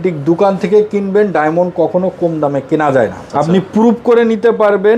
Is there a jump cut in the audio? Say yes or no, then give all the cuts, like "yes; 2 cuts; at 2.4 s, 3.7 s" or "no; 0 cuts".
yes; 1 cut; at 3.3 s